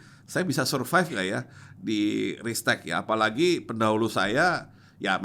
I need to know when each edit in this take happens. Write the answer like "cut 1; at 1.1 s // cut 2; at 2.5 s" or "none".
none